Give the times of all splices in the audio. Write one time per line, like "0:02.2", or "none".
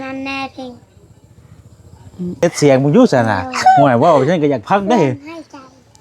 0:02.4